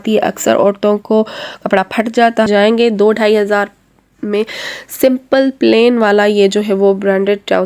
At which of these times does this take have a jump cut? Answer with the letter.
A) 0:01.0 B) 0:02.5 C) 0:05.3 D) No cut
B